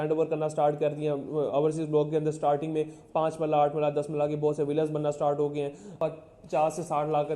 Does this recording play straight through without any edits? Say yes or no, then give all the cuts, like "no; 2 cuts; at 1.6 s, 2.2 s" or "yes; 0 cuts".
no; 1 cut; at 5.9 s